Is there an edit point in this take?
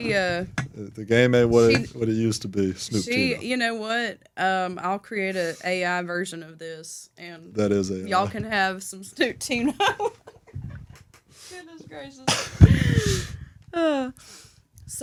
no; 0 cuts

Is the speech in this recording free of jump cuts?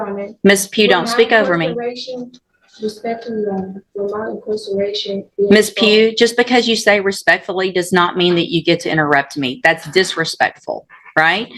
yes; 0 cuts

